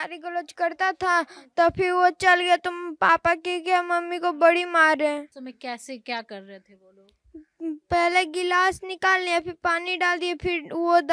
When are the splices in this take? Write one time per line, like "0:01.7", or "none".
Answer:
none